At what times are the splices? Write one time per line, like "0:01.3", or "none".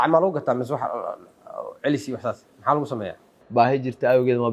0:03.4